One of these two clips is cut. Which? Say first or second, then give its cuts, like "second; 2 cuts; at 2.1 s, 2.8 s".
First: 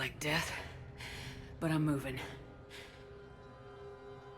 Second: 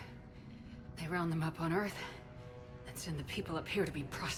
first; 1 cut; at 2.3 s